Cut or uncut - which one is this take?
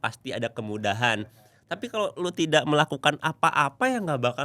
uncut